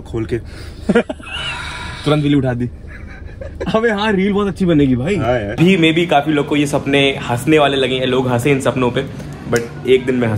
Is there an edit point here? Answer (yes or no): yes